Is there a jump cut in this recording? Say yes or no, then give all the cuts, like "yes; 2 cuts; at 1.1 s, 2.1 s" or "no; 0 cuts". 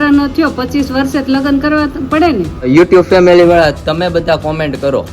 yes; 1 cut; at 2.7 s